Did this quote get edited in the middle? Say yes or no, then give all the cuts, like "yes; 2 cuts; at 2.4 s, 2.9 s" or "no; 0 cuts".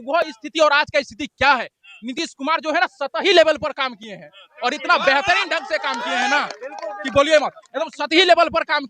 no; 0 cuts